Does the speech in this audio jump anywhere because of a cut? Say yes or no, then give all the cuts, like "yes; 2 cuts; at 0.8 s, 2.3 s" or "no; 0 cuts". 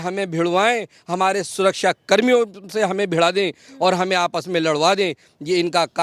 no; 0 cuts